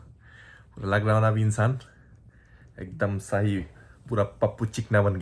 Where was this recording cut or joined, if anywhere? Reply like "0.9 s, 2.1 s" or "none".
none